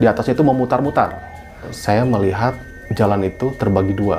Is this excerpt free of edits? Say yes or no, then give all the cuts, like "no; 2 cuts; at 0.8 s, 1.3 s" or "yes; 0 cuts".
no; 1 cut; at 1.7 s